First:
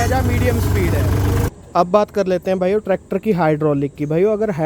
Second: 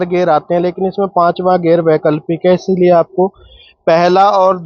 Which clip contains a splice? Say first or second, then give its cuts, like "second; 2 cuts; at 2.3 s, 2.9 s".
first; 1 cut; at 1.5 s